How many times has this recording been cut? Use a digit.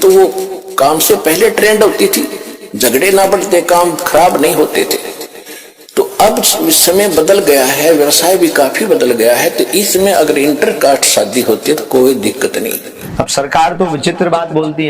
1